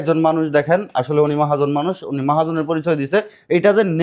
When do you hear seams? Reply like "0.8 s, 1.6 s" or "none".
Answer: none